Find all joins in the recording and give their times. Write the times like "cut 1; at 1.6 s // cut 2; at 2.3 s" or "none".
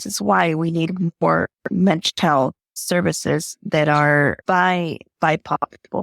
cut 1; at 2.7 s // cut 2; at 4.4 s